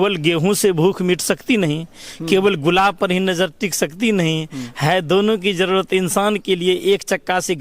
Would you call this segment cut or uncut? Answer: uncut